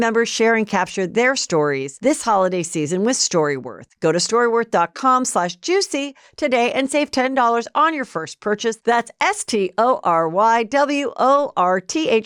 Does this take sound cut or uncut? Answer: uncut